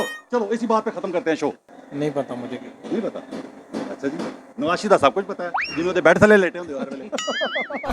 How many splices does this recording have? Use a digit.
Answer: 1